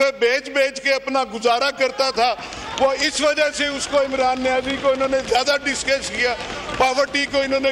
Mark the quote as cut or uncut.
uncut